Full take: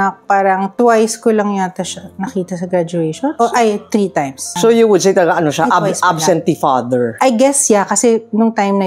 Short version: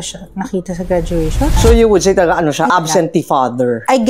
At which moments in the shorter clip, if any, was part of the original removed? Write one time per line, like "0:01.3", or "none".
0:01.5
0:02.7